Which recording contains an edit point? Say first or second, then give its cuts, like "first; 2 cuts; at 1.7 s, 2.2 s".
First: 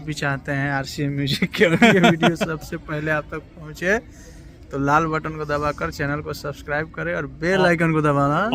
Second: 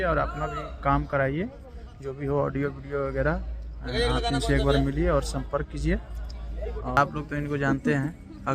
second; 1 cut; at 7.0 s